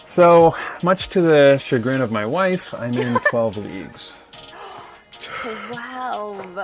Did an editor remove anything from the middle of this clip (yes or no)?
no